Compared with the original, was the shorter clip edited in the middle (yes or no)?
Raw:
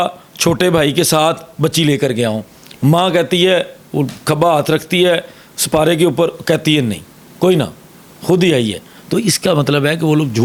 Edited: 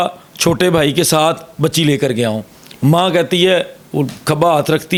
no